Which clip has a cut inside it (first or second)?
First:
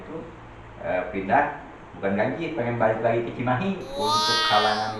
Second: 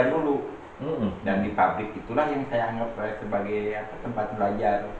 first